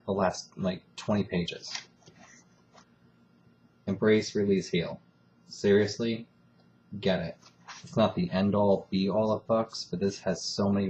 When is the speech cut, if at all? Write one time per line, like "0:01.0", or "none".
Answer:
0:01.3